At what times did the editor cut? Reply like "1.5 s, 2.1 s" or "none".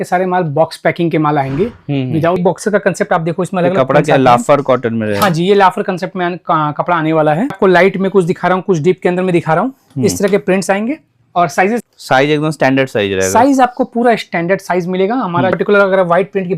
2.4 s, 7.5 s, 11.8 s, 15.5 s

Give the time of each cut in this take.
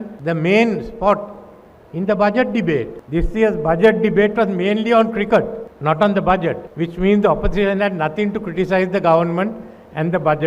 none

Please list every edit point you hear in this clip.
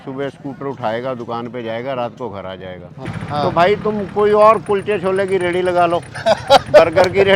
3.2 s

